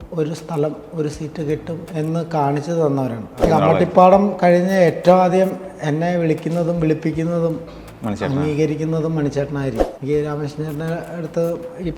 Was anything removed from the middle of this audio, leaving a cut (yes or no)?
yes